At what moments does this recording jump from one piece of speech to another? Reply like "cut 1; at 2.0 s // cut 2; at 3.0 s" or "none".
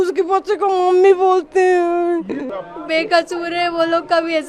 cut 1; at 2.5 s